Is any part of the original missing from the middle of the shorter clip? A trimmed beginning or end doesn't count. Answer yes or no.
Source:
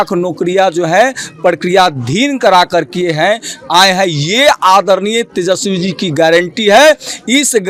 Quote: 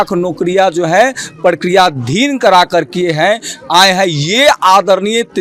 no